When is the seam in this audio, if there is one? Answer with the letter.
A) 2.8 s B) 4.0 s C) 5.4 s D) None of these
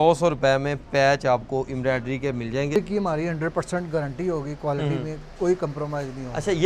A